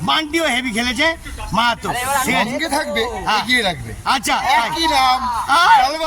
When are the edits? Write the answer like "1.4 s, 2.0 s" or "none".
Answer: none

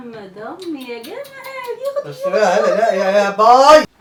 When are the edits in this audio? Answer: none

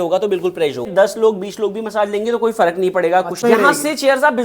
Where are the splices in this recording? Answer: 0.9 s, 3.4 s

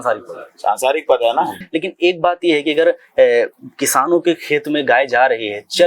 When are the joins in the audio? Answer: 1.6 s

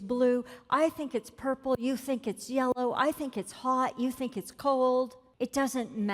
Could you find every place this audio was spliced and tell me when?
5.2 s

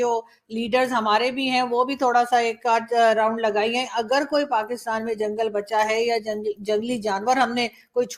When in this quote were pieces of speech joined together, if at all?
none

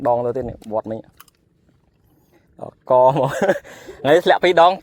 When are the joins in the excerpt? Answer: none

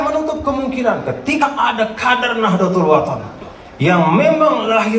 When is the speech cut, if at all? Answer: 1.4 s

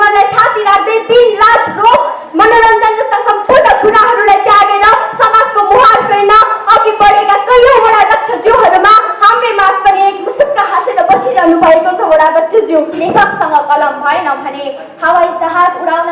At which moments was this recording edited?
13.0 s

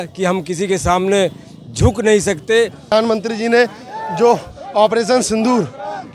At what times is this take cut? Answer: 2.9 s

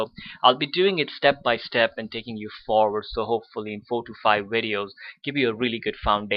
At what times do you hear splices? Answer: none

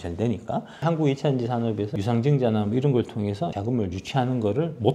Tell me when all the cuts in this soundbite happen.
0.8 s, 1.9 s, 3.6 s

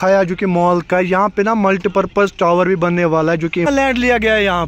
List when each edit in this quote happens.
3.7 s

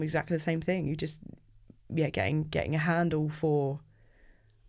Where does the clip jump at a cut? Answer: none

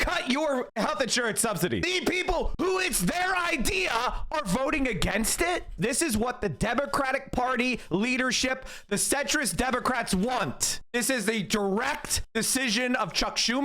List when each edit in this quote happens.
1.9 s, 5.7 s

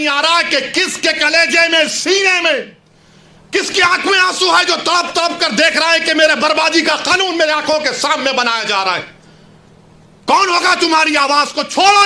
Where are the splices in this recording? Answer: none

